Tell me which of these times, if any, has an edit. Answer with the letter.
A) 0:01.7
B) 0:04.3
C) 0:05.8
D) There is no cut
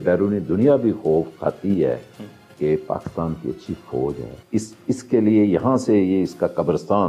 B